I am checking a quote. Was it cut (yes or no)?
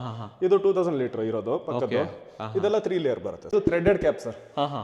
yes